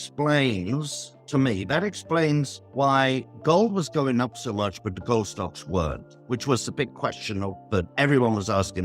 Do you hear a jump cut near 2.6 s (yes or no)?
yes